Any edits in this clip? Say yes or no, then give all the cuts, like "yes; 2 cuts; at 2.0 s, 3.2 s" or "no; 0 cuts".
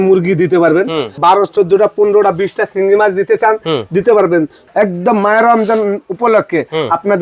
yes; 2 cuts; at 1.2 s, 4.6 s